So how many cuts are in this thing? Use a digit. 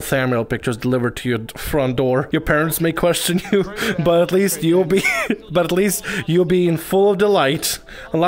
1